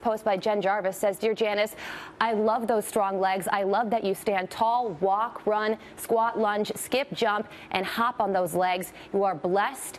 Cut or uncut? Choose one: cut